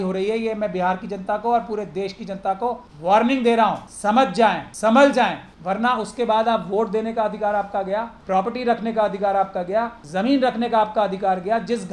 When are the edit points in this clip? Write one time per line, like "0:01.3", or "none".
0:02.9
0:04.4
0:05.5
0:08.1
0:10.0

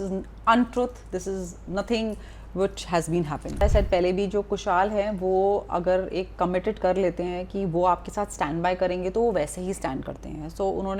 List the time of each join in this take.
0:03.6

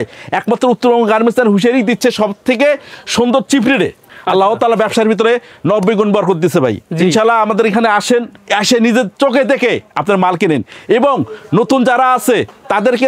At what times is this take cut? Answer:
0:04.1

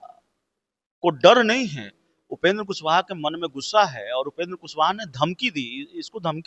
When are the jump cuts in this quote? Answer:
none

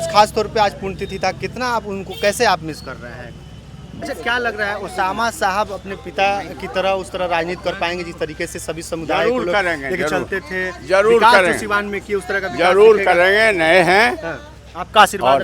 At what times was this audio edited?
0:04.0

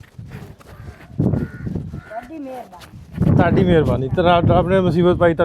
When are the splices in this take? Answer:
none

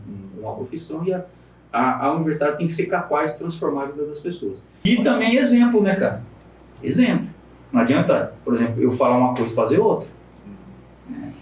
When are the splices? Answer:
0:04.8

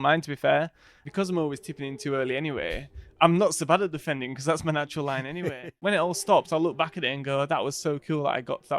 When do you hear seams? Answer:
0:01.0
0:05.7

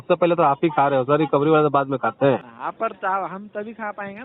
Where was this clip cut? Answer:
0:02.5

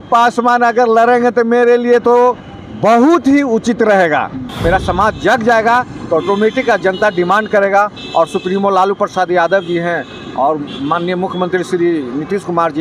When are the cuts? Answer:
0:04.5

